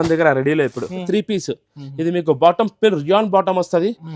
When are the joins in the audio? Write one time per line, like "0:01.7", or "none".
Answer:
0:01.0